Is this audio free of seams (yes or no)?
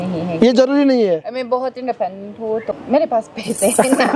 no